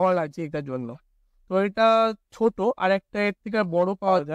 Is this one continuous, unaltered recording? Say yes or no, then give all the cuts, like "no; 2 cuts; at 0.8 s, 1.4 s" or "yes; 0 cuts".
yes; 0 cuts